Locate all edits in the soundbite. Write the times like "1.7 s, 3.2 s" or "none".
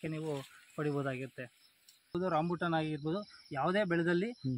2.1 s